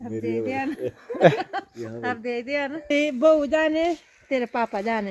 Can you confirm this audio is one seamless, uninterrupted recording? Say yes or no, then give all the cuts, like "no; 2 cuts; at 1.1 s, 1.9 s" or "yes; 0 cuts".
no; 1 cut; at 2.9 s